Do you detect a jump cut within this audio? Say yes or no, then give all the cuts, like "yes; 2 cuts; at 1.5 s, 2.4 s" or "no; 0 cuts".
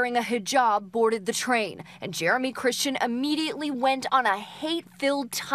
no; 0 cuts